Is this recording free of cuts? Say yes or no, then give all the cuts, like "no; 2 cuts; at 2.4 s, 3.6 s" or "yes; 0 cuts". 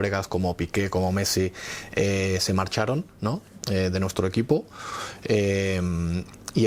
yes; 0 cuts